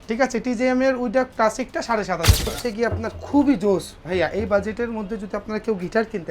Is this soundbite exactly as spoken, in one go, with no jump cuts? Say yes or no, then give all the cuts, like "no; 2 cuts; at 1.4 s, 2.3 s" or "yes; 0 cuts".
no; 1 cut; at 2.4 s